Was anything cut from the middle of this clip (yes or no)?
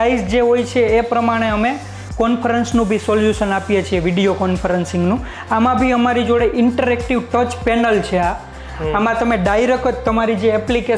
no